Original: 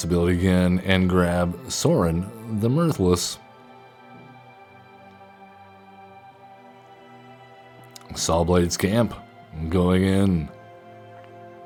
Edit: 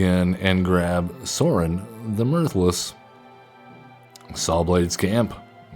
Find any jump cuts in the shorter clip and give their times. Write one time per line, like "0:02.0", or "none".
0:04.1